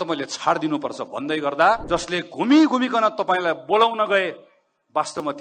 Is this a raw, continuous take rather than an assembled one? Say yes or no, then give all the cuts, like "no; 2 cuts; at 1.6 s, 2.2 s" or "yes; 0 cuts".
no; 1 cut; at 1.8 s